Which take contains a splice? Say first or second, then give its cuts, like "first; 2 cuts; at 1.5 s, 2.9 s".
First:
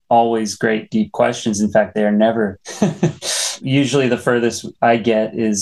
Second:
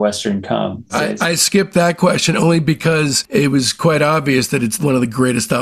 second; 2 cuts; at 1.1 s, 3.2 s